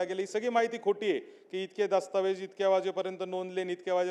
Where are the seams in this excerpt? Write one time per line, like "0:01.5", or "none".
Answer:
none